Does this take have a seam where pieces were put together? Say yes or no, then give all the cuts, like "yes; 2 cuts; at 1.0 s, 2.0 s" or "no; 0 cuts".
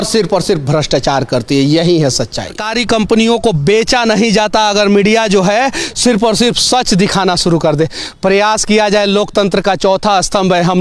yes; 1 cut; at 2.7 s